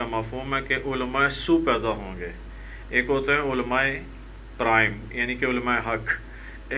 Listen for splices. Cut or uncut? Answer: uncut